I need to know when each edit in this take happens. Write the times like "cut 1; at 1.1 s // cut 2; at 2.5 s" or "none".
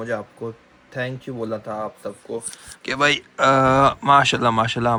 none